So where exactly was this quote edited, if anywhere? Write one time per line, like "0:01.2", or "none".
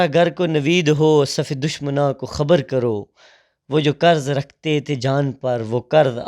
none